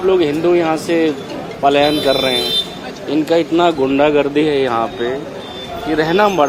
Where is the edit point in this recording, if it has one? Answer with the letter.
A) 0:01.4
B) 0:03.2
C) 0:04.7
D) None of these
D